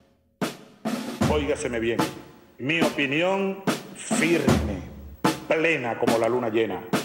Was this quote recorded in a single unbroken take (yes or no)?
no